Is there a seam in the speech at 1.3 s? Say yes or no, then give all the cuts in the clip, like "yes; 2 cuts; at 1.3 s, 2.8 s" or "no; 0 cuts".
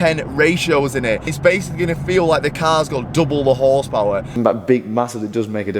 yes; 2 cuts; at 1.3 s, 4.4 s